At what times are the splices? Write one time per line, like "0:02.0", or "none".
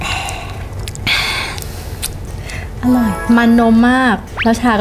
none